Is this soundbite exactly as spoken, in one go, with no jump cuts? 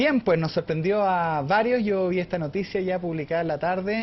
yes; 0 cuts

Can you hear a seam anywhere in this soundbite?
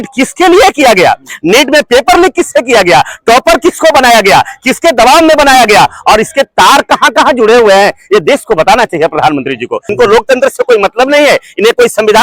yes; 1 cut; at 9.9 s

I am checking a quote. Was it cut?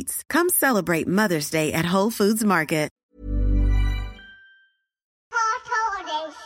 yes; 2 cuts; at 2.9 s, 5.1 s

